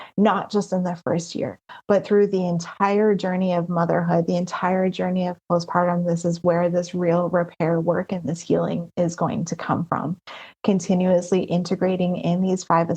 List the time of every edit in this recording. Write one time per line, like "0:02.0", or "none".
none

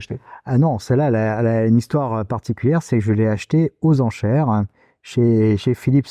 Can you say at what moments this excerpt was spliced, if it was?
none

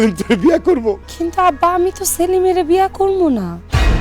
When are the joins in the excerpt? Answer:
0:01.1

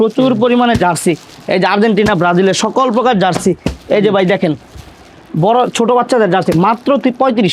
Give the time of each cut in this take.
none

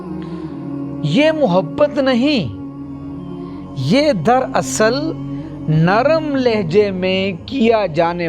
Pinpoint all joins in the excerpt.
0:01.1

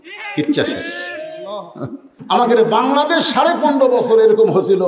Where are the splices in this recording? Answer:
0:02.1

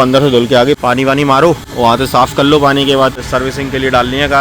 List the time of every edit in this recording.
0:01.7
0:03.2

